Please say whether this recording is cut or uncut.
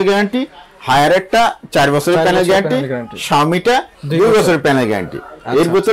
uncut